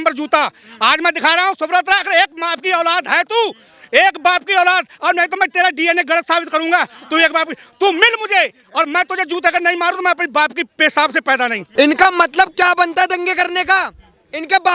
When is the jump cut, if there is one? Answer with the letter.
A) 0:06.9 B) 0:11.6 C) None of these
B